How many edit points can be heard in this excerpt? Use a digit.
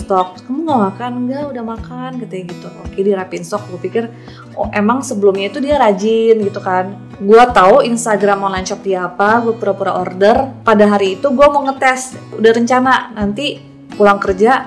3